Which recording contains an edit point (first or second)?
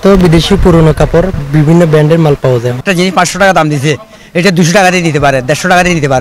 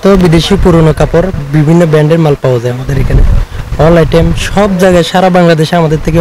first